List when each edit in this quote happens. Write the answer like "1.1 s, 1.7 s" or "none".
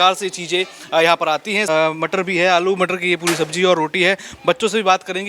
1.7 s